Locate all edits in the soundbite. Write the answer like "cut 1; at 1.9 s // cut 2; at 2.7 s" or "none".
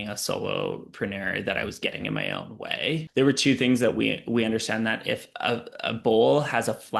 cut 1; at 3.1 s